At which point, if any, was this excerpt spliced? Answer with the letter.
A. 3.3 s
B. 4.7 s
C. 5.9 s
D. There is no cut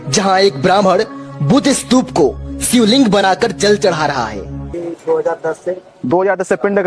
B